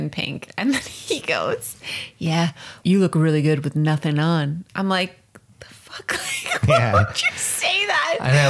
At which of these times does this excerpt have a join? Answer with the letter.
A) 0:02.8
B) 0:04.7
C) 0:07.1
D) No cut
A